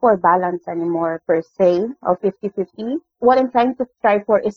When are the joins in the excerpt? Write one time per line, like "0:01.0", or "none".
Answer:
none